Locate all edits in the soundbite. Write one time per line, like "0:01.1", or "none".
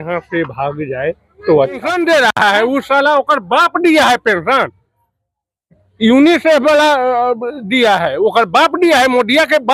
0:01.9